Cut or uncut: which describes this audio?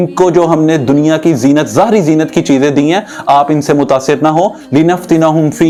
uncut